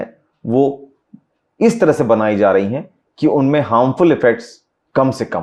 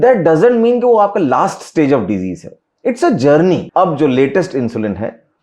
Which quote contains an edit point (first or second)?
second